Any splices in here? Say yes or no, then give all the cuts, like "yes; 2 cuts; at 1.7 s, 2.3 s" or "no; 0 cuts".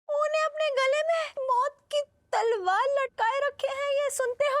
yes; 1 cut; at 1.3 s